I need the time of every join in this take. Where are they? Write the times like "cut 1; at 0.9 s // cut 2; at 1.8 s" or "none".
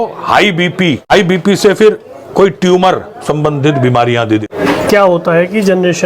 cut 1; at 1.1 s // cut 2; at 4.4 s